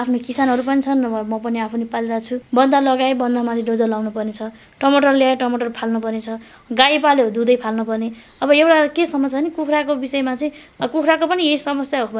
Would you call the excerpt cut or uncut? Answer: cut